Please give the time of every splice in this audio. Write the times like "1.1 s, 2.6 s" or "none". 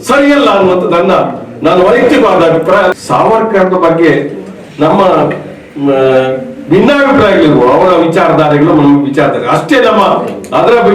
2.9 s